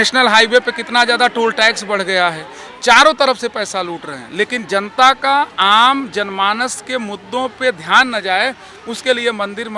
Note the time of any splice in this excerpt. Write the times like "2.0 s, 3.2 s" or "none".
none